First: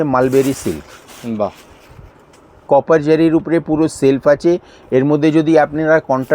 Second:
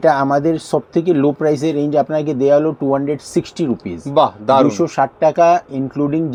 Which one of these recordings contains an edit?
first; 1 cut; at 2.6 s

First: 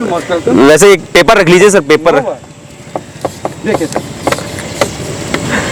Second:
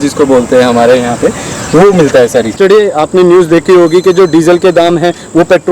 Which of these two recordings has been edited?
second; 1 cut; at 2.6 s

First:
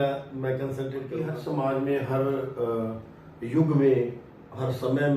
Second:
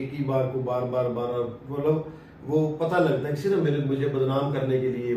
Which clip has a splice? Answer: first; 1 cut; at 1.2 s

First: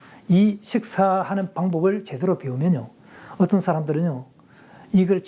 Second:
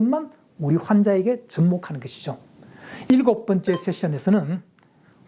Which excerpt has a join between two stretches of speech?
second; 1 cut; at 3.1 s

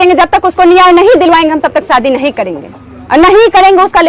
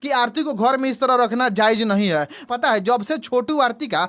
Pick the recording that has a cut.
second; 1 cut; at 2.5 s

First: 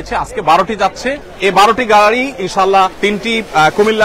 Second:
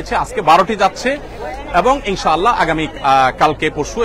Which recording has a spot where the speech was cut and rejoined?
first; 2 cuts; at 1.2 s, 2.9 s

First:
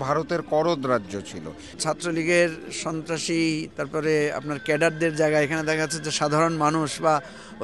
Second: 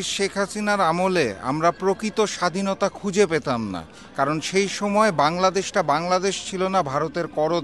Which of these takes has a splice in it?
first; 1 cut; at 1.7 s

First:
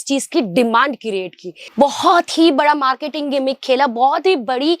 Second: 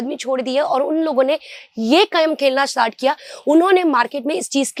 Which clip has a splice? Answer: first; 1 cut; at 1.6 s

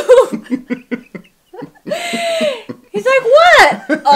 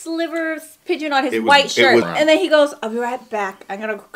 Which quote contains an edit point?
second; 1 cut; at 2.1 s

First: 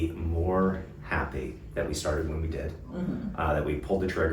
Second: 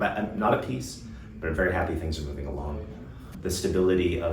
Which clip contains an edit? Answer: second; 1 cut; at 3.3 s

